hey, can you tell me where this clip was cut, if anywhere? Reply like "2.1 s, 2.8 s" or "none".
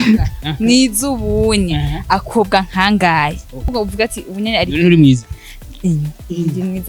3.7 s